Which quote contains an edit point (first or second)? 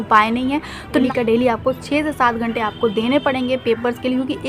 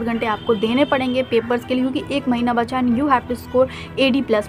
first